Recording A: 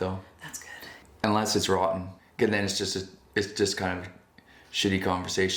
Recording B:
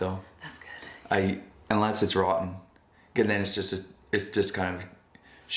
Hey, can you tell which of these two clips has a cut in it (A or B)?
A